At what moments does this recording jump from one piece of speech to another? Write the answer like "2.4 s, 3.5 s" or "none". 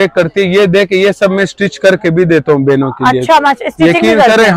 none